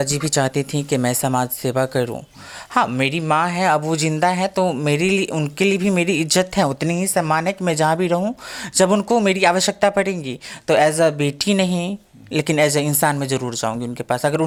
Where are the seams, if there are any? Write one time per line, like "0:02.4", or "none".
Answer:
none